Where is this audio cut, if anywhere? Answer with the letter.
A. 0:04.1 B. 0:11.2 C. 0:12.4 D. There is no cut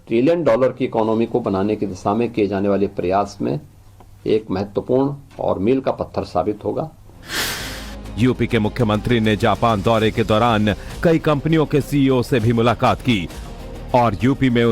C